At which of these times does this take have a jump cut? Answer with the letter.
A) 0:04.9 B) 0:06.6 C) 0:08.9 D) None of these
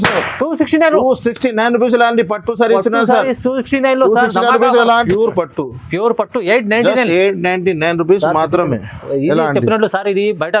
A